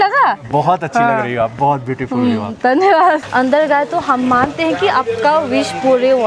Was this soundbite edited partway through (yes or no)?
yes